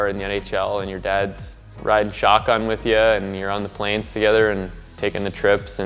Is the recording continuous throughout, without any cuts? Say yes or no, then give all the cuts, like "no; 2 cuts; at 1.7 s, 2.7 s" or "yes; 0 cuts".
yes; 0 cuts